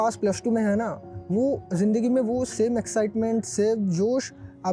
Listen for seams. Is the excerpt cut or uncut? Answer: uncut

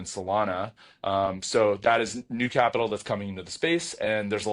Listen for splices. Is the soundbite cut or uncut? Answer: uncut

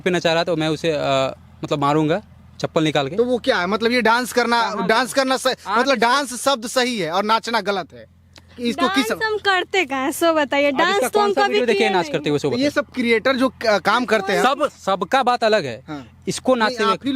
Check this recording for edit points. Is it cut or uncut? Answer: uncut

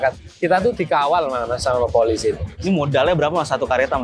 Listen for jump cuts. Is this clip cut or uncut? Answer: cut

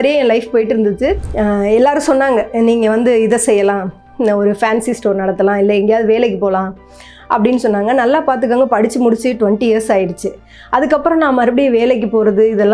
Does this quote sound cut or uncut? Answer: cut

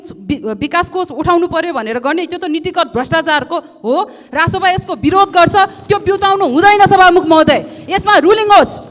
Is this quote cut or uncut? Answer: uncut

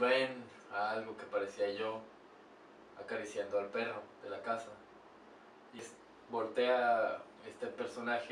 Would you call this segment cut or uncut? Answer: cut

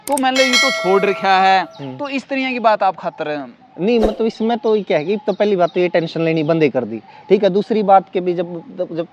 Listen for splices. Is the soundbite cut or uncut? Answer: uncut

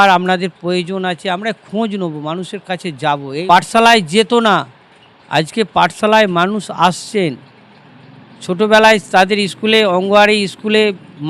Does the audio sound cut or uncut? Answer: cut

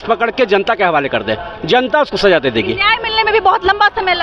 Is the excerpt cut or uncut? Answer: uncut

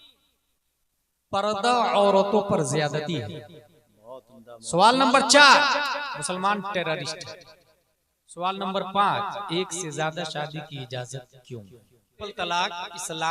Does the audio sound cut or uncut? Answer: cut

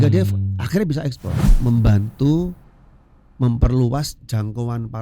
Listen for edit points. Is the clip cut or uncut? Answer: cut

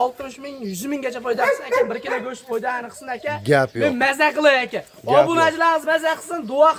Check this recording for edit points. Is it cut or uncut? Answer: uncut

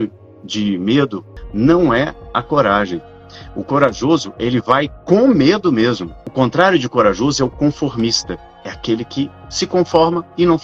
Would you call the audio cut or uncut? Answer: cut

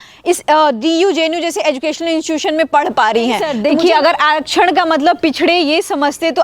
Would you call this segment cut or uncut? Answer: cut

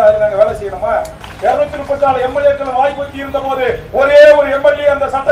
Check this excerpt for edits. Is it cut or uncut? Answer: cut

